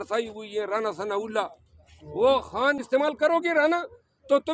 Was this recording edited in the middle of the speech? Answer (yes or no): yes